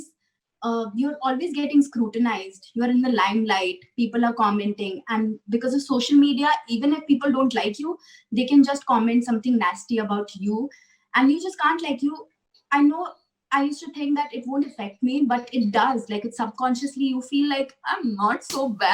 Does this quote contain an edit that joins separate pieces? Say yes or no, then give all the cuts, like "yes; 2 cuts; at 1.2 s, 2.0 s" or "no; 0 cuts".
no; 0 cuts